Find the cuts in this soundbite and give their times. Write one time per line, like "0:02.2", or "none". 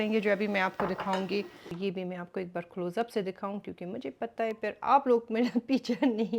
0:01.7